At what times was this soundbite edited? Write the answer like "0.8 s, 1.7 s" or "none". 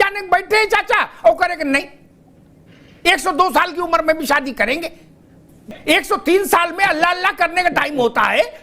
5.7 s

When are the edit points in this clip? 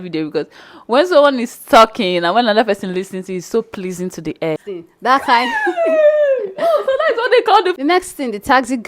4.6 s, 7.8 s

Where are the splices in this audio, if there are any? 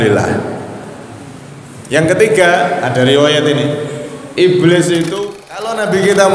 5.2 s

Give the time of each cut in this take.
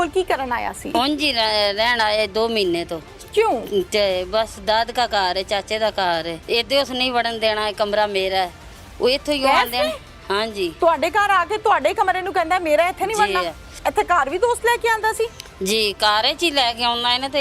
0.9 s, 6.4 s, 13.8 s

